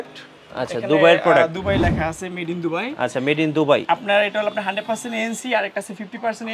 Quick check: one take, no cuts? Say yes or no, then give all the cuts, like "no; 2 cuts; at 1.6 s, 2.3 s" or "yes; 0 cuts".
yes; 0 cuts